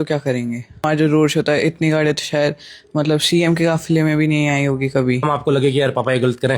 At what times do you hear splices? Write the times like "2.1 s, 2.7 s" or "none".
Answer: 0.8 s, 5.2 s